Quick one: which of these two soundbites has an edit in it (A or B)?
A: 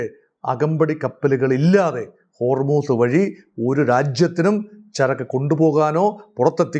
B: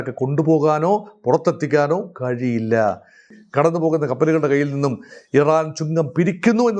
B